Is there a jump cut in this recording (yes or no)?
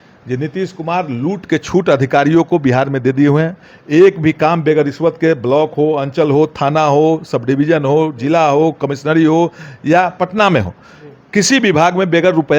no